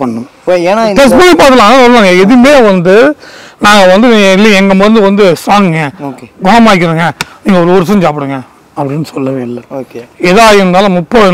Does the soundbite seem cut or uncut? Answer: uncut